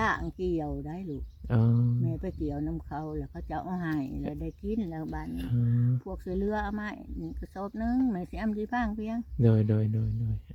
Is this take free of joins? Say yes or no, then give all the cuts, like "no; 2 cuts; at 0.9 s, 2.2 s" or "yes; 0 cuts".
yes; 0 cuts